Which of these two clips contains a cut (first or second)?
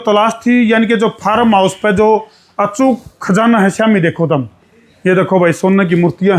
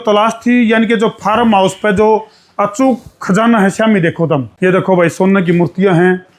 second